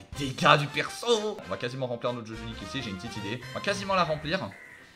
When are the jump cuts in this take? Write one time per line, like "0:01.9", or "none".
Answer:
0:01.5
0:03.5